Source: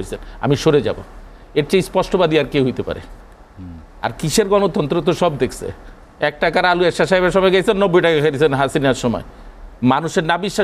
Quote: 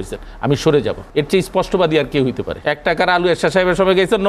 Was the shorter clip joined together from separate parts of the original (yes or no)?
yes